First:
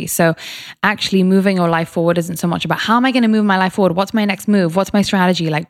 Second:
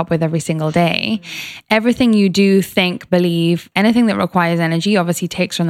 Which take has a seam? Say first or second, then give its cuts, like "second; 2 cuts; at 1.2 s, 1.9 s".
second; 1 cut; at 3.7 s